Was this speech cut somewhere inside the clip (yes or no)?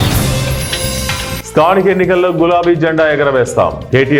no